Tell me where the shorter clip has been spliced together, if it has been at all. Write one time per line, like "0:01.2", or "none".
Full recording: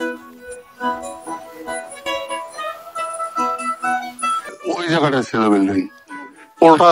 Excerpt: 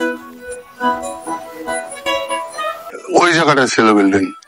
0:02.9